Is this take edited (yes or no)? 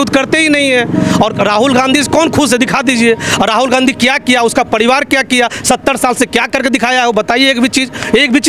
no